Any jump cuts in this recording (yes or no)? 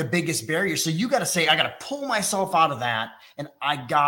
no